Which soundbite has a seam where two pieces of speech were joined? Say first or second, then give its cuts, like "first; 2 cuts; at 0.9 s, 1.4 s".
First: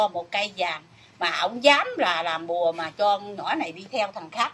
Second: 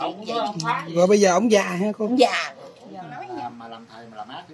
second; 1 cut; at 3.3 s